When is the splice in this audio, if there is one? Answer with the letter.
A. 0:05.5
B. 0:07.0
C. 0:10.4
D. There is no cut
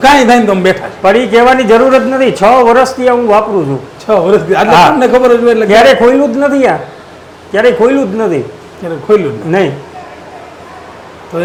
D